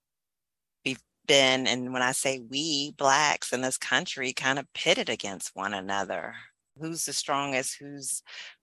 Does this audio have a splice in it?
yes; 1 cut; at 6.7 s

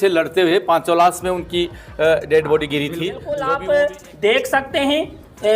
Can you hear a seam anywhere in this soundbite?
yes; 1 cut; at 3.4 s

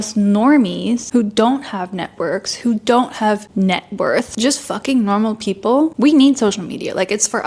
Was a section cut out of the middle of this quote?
yes; 4 cuts; at 1.0 s, 3.5 s, 4.3 s, 5.9 s

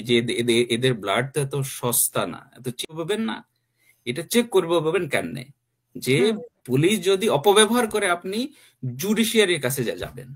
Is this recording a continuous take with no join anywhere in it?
no; 1 cut; at 2.8 s

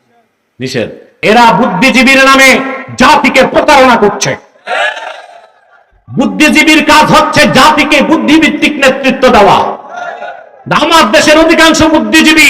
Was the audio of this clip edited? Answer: yes; 1 cut; at 1.2 s

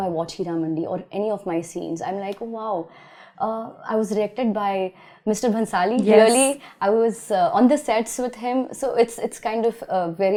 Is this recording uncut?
yes; 0 cuts

